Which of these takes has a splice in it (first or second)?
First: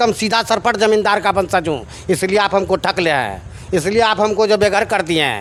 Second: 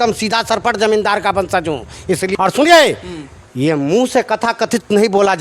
second